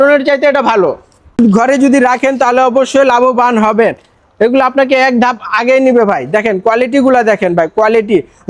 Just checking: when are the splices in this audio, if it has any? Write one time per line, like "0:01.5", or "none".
0:01.4

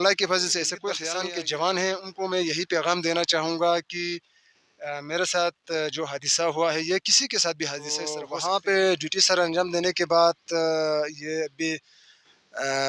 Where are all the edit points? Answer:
0:01.0
0:08.2

